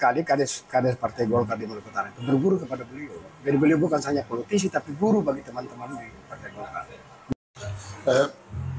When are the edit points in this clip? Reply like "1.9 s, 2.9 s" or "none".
7.3 s